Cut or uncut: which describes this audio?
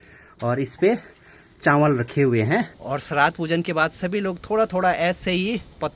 cut